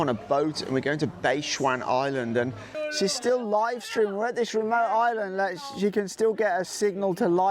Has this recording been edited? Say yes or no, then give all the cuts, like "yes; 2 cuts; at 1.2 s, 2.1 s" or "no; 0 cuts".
yes; 1 cut; at 2.7 s